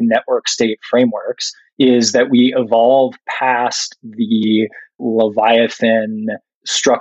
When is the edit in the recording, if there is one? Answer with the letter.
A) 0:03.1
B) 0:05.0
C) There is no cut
B